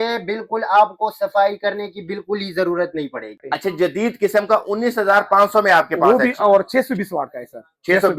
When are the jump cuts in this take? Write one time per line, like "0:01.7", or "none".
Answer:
0:03.4